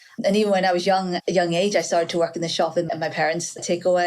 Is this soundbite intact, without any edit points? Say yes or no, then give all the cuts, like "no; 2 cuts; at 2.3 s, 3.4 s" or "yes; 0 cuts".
no; 1 cut; at 2.9 s